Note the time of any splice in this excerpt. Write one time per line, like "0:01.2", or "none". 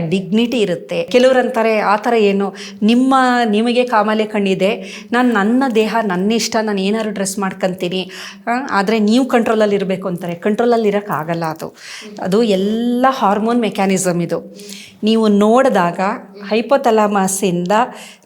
0:01.1